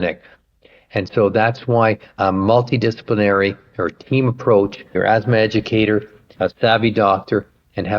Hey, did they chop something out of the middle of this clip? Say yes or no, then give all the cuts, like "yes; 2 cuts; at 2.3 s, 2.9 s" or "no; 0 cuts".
yes; 3 cuts; at 2.2 s, 4.8 s, 6.3 s